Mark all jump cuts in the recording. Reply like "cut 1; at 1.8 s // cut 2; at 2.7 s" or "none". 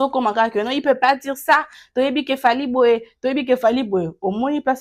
none